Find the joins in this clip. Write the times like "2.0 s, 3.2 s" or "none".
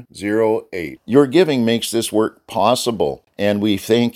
3.2 s